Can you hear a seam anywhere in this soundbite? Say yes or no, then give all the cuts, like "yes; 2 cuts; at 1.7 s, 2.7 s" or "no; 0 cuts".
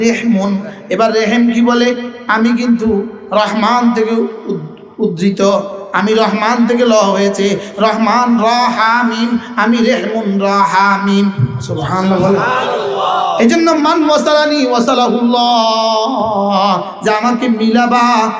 no; 0 cuts